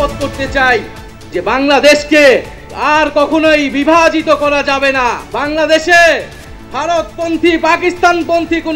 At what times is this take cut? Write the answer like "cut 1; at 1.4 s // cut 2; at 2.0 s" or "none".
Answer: cut 1; at 5.3 s

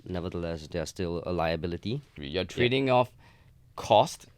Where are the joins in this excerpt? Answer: cut 1; at 2.2 s

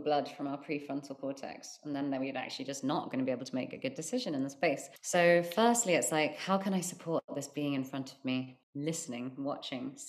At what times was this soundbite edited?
cut 1; at 4.9 s // cut 2; at 8.6 s

